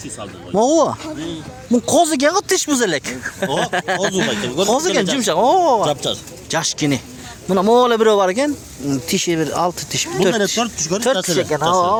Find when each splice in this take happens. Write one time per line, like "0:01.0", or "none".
none